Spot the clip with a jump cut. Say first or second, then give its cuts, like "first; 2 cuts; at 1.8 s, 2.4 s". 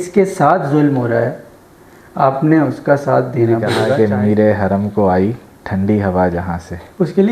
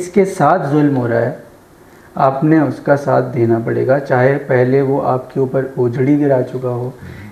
first; 1 cut; at 3.9 s